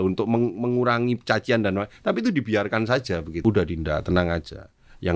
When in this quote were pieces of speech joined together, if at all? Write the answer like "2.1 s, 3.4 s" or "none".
3.4 s